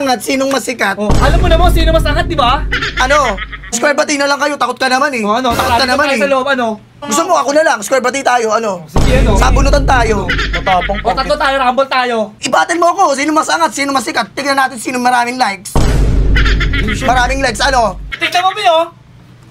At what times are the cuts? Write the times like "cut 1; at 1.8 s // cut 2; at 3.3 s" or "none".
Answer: cut 1; at 3.7 s // cut 2; at 6.9 s // cut 3; at 12.3 s // cut 4; at 18.1 s